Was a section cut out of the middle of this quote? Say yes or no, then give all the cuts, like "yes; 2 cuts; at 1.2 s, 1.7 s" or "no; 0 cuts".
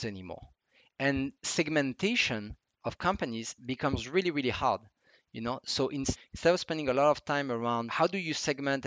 yes; 2 cuts; at 6.2 s, 7.9 s